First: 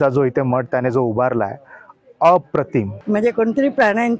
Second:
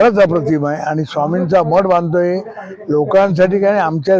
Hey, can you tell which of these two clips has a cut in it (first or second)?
first